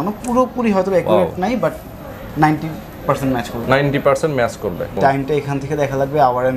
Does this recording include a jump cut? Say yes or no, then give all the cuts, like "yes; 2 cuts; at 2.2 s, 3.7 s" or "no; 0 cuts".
yes; 1 cut; at 5.0 s